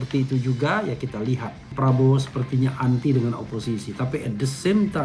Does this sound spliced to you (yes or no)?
yes